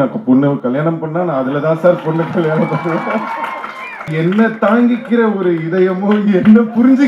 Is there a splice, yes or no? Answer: yes